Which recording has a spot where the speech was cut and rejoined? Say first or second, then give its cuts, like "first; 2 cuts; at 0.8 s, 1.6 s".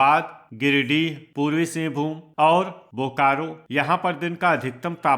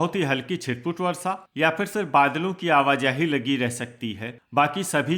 first; 3 cuts; at 1.2 s, 2.2 s, 3.6 s